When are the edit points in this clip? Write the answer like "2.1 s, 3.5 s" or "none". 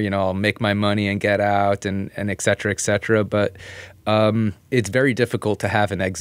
4.7 s